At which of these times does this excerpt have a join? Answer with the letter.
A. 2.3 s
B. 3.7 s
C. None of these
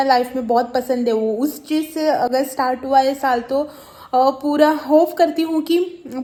C